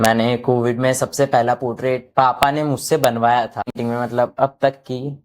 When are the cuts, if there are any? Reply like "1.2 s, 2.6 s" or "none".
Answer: 3.8 s